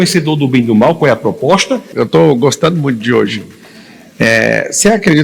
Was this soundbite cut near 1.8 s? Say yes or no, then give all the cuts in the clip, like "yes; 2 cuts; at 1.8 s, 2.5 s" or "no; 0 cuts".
yes; 1 cut; at 1.8 s